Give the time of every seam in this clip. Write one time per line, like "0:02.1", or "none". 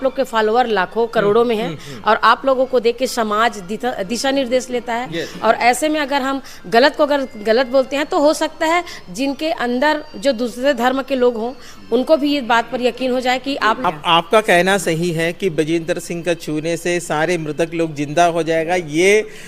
0:13.8